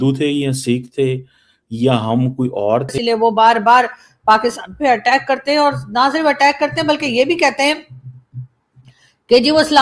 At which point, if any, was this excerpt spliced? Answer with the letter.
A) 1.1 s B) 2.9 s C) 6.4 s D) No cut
B